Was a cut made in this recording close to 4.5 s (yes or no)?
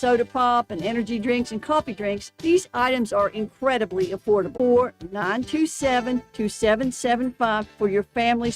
yes